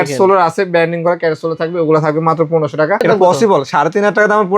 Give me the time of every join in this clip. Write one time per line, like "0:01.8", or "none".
0:03.0